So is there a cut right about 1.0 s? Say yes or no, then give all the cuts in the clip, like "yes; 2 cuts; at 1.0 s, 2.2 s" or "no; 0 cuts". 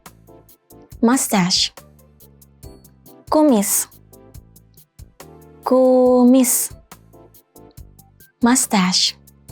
yes; 3 cuts; at 1.0 s, 6.6 s, 8.1 s